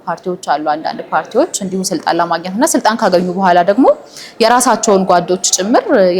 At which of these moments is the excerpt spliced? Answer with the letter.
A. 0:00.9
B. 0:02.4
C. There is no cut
C